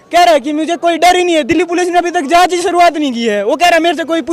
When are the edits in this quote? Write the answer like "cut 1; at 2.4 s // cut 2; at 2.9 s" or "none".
none